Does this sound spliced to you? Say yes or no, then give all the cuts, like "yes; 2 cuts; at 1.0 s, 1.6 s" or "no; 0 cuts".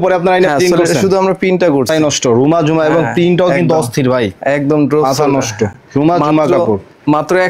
yes; 1 cut; at 1.9 s